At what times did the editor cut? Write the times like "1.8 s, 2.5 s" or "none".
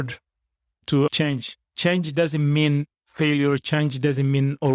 1.1 s